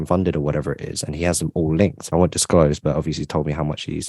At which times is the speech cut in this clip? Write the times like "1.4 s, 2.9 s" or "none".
2.1 s

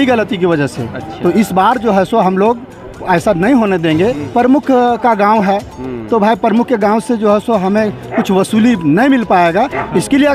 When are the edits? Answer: 4.2 s

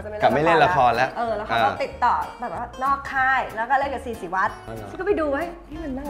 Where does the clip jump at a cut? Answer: 4.7 s

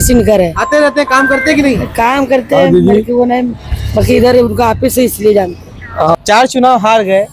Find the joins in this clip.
6.2 s

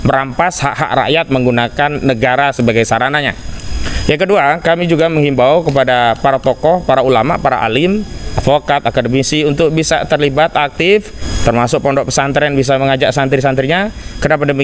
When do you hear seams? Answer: none

